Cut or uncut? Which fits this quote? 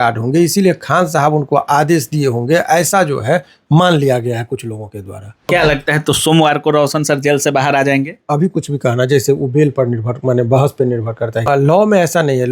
cut